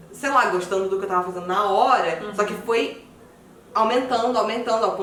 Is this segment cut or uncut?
uncut